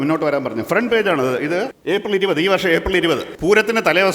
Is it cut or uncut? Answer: cut